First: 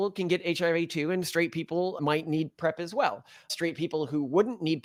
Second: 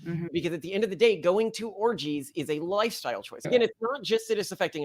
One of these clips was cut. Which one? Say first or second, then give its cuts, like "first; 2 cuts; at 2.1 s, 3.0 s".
second; 1 cut; at 3.5 s